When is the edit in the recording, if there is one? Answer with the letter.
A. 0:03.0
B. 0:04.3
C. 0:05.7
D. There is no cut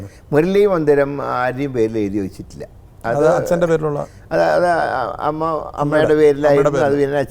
D